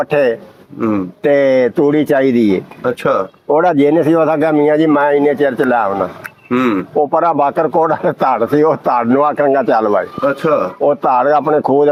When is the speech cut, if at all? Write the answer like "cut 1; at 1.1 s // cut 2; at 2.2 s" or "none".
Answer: none